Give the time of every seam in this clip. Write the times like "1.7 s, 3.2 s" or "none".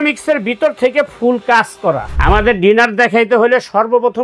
2.1 s